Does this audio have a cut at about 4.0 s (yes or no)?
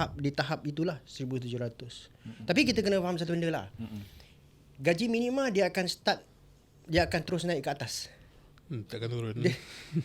no